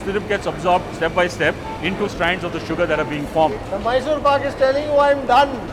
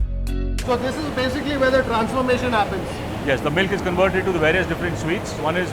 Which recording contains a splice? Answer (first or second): first